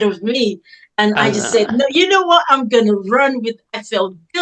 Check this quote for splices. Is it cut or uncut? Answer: uncut